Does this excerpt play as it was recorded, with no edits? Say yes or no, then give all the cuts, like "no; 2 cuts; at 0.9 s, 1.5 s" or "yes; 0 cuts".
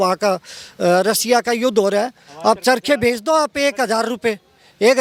yes; 0 cuts